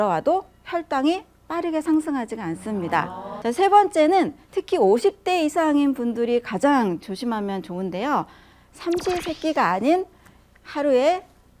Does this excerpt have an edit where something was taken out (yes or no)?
yes